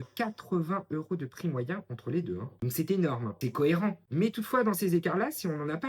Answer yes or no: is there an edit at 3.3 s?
yes